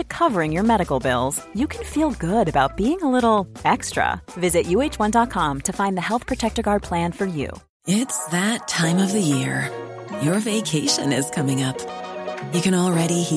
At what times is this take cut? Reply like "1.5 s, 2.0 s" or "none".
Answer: 7.6 s